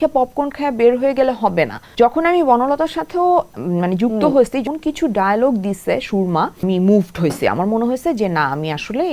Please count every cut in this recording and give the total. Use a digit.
3